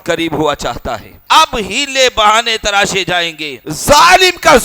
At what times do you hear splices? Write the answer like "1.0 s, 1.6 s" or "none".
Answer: 1.1 s, 3.7 s